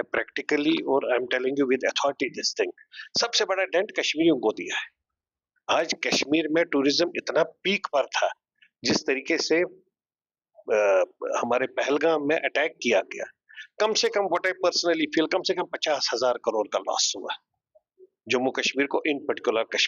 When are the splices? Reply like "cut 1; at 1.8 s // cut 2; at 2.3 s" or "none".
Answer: none